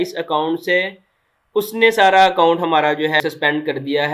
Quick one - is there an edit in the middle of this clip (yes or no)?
yes